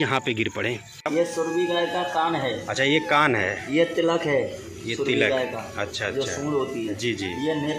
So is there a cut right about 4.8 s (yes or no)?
no